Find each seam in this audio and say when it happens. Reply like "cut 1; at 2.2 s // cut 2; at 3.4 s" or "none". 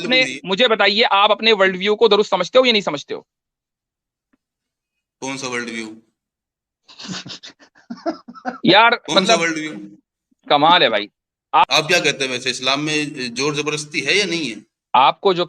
cut 1; at 11.6 s